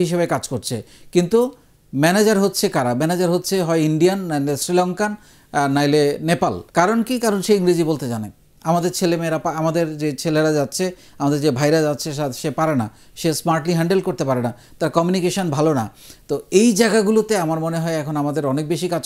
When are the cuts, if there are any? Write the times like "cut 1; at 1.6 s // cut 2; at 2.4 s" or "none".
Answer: cut 1; at 6.6 s